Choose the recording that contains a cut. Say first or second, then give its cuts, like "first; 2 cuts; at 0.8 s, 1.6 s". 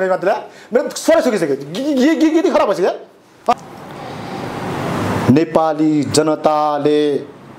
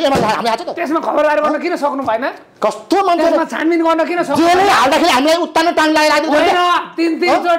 first; 1 cut; at 3.5 s